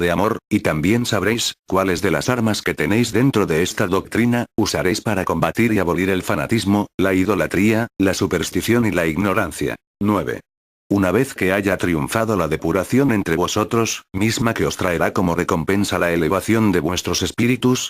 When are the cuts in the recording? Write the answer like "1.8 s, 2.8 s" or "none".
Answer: none